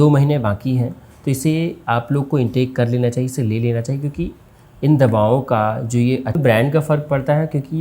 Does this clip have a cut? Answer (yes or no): yes